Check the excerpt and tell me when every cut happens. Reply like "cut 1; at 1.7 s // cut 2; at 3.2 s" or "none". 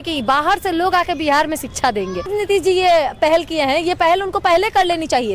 cut 1; at 2.3 s